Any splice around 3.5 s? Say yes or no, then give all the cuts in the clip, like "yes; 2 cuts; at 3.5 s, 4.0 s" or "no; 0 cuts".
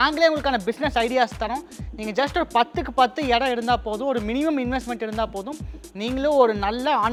no; 0 cuts